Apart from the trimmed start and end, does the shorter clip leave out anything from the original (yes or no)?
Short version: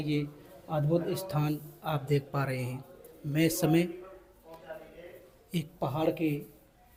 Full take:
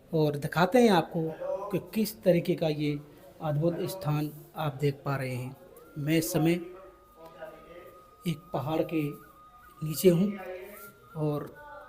no